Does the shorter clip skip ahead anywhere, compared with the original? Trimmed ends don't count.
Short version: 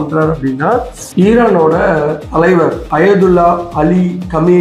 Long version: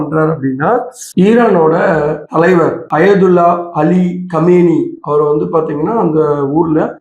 no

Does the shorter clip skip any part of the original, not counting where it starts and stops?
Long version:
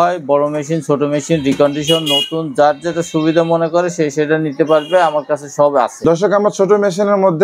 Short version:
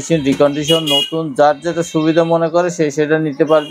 no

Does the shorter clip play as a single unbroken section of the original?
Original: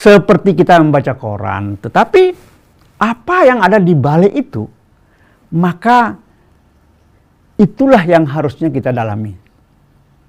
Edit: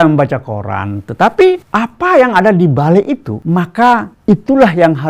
no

